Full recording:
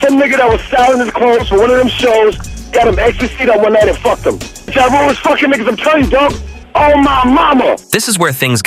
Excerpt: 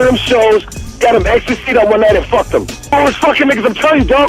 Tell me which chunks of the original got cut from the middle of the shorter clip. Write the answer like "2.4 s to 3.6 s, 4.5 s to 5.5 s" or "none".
4.6 s to 4.9 s